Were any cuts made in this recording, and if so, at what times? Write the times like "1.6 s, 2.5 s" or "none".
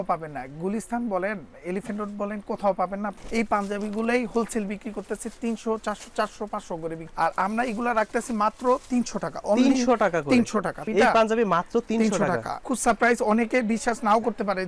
3.2 s, 7.0 s, 10.8 s, 12.6 s

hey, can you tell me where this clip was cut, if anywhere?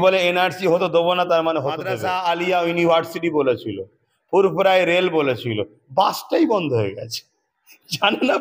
2.0 s

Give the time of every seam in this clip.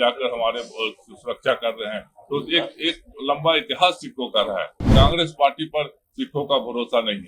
4.8 s

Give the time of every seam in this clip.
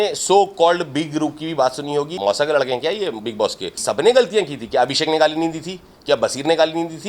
2.1 s, 3.7 s

